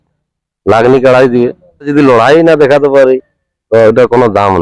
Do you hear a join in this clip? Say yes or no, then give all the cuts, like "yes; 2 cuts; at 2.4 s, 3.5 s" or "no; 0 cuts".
yes; 1 cut; at 1.9 s